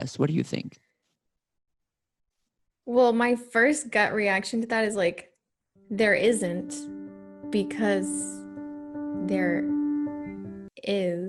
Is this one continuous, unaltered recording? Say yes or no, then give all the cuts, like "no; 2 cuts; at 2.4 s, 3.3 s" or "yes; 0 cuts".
yes; 0 cuts